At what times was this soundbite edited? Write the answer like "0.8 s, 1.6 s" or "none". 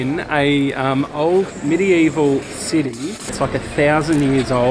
none